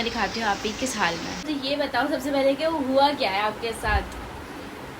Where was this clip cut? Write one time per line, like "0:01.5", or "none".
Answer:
0:01.5